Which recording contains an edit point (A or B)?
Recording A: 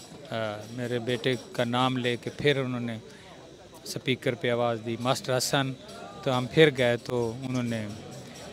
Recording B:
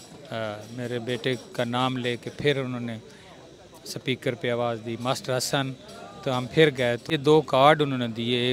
B